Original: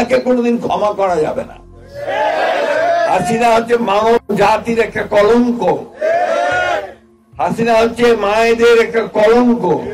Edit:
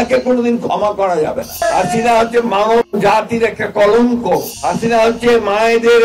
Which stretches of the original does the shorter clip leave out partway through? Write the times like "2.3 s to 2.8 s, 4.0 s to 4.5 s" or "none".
1.6 s to 3.0 s, 5.9 s to 7.3 s